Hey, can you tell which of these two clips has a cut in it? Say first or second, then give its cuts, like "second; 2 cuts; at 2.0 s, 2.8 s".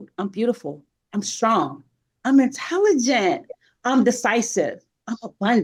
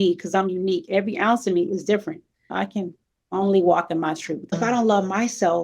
second; 2 cuts; at 2.5 s, 4.6 s